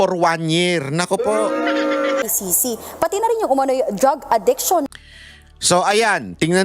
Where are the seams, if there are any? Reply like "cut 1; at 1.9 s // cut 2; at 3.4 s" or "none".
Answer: cut 1; at 2.2 s